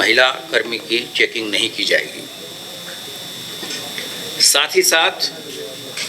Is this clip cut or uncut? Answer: uncut